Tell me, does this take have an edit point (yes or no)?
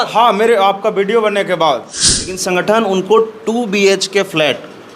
yes